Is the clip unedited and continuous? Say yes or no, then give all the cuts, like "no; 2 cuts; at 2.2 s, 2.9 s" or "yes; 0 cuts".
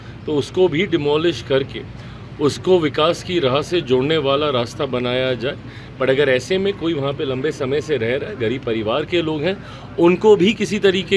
yes; 0 cuts